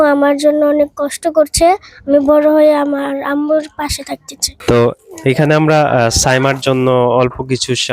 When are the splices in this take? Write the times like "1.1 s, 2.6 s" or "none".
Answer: 4.5 s